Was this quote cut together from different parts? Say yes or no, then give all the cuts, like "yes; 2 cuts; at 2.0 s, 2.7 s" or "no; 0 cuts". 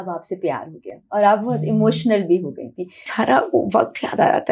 yes; 1 cut; at 3.1 s